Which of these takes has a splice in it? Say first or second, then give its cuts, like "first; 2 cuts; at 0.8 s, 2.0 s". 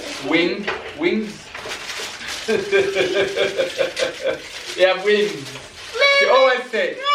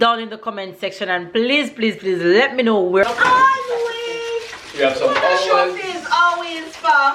second; 1 cut; at 3.0 s